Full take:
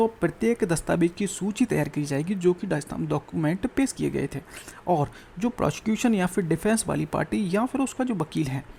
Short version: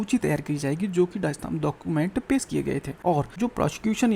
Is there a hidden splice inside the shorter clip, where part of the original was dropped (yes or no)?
yes